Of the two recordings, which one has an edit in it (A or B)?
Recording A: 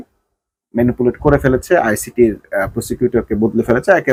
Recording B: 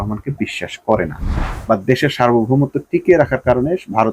B